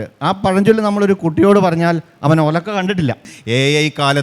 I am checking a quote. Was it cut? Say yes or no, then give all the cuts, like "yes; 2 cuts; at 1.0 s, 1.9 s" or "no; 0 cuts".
yes; 1 cut; at 3.3 s